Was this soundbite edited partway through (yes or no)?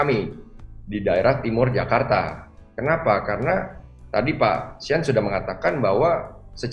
no